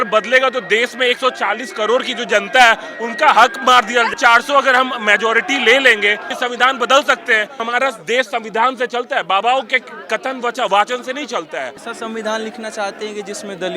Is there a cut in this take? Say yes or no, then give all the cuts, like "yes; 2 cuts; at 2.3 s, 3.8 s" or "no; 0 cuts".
yes; 4 cuts; at 4.1 s, 6.3 s, 7.6 s, 11.8 s